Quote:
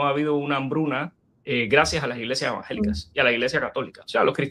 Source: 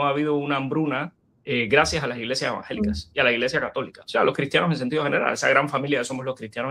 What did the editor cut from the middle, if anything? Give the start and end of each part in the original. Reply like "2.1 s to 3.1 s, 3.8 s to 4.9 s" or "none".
none

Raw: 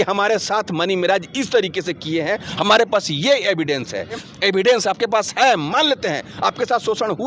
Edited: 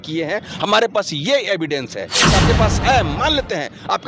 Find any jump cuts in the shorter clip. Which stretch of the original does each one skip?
4.3 s to 4.8 s

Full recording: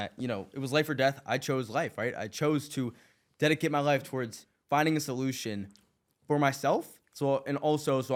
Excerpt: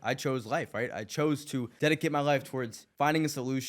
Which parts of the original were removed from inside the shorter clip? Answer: 2.9 s to 3.3 s, 4.4 s to 4.5 s

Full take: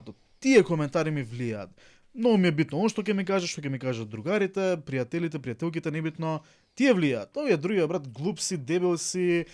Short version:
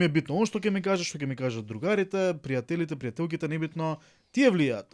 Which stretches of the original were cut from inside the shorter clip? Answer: none

